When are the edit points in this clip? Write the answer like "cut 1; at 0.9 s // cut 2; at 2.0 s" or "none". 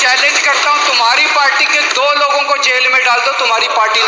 none